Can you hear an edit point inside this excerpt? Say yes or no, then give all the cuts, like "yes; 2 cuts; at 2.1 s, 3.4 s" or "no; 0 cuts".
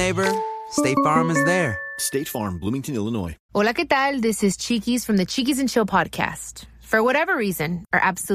no; 0 cuts